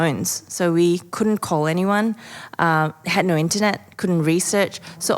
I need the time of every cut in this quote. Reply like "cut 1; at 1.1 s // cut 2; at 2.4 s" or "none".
none

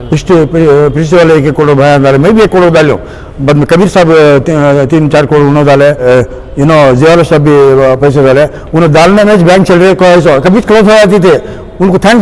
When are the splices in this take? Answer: cut 1; at 6.0 s

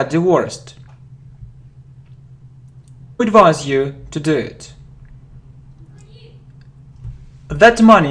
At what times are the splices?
none

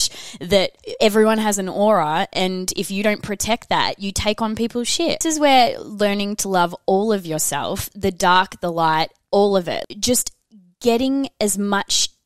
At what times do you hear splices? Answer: cut 1; at 5.2 s // cut 2; at 9.8 s

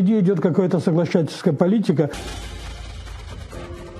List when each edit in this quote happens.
cut 1; at 2.2 s

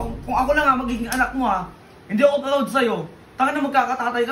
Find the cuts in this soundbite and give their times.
none

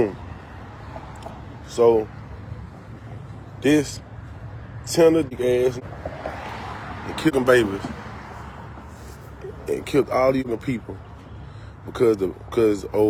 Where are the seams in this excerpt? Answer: none

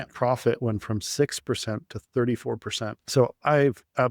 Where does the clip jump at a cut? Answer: cut 1; at 3.0 s

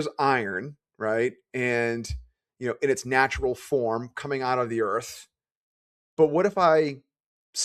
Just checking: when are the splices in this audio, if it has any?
none

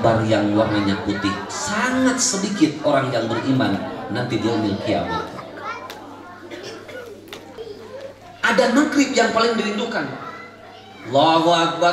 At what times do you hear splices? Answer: cut 1; at 7.5 s

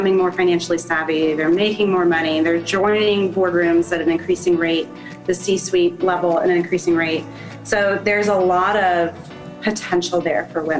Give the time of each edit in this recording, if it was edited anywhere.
cut 1; at 9.3 s

